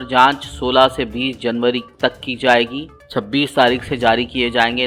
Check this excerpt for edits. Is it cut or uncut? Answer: uncut